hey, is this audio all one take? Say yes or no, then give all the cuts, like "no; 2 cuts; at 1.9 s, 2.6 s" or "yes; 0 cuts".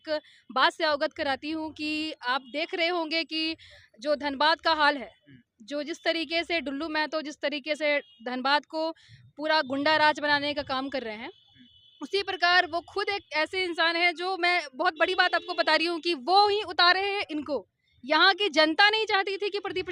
yes; 0 cuts